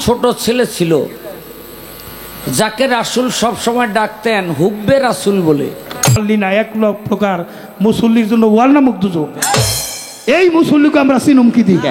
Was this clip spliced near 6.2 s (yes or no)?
yes